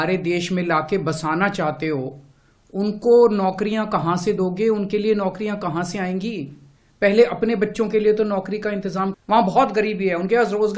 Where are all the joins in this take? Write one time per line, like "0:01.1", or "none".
0:09.2